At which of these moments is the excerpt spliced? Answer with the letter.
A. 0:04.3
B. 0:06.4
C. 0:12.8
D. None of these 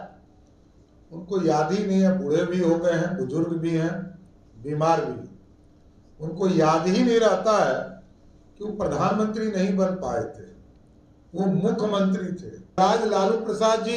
C